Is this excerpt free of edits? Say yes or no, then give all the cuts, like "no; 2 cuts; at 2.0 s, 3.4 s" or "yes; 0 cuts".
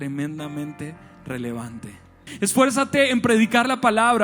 no; 1 cut; at 2.3 s